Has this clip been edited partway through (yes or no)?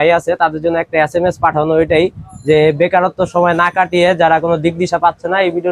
no